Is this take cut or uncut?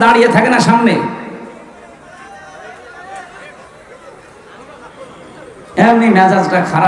uncut